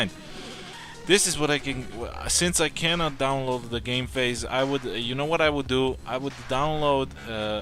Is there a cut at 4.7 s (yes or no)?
no